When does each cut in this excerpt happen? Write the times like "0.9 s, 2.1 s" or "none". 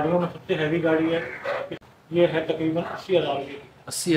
1.7 s